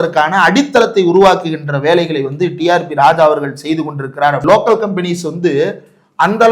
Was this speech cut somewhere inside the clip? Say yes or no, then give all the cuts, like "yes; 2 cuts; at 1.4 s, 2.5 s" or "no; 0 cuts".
yes; 1 cut; at 4.4 s